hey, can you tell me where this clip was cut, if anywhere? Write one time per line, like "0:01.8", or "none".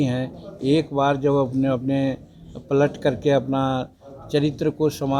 none